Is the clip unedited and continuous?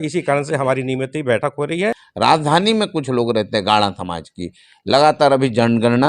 no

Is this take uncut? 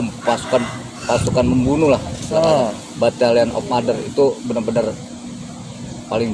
yes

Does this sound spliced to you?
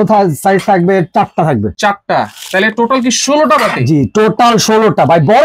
no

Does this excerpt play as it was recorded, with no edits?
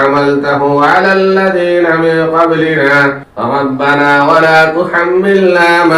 no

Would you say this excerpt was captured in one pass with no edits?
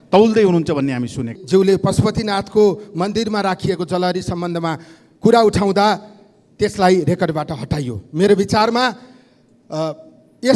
no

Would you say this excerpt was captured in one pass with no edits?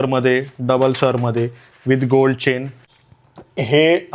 no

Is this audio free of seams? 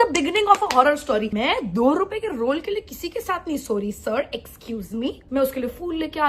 no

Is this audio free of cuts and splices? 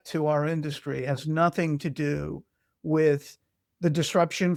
yes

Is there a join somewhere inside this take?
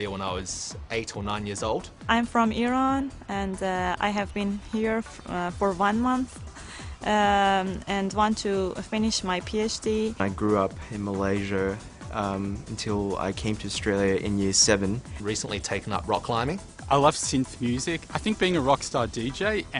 no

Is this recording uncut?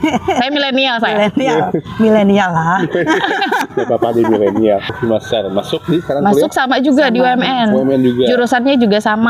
no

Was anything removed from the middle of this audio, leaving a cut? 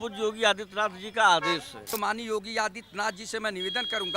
yes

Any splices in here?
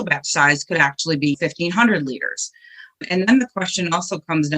yes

